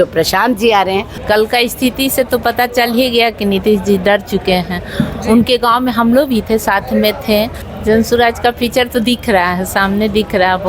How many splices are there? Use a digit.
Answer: 2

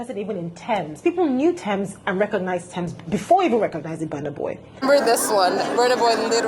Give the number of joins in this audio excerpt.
1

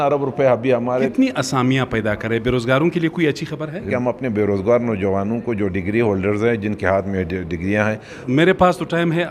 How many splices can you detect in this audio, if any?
3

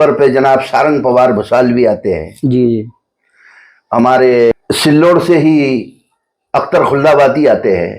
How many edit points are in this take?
1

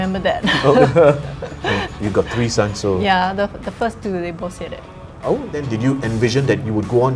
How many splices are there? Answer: 1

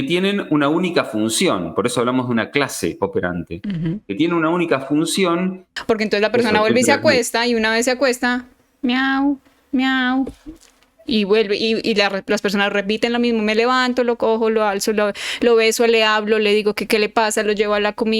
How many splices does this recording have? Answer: 1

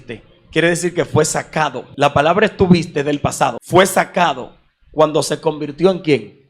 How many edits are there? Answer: 2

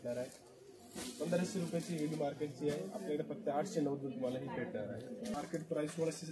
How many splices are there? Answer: 1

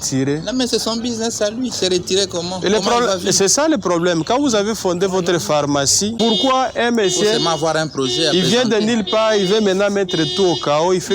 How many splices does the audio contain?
1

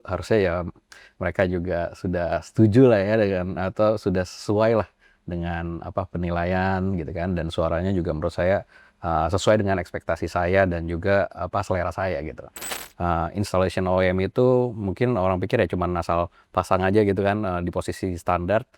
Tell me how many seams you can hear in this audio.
1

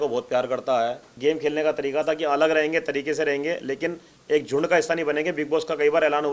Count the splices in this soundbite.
1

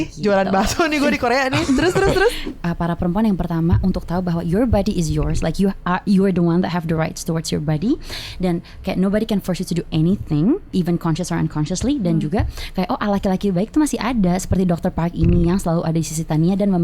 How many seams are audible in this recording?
1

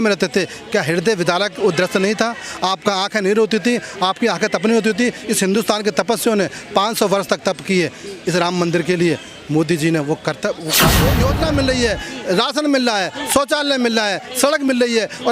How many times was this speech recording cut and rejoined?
1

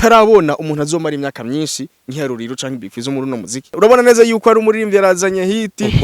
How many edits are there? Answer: 1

